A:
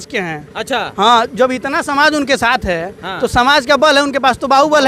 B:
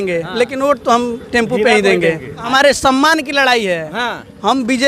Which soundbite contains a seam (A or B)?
B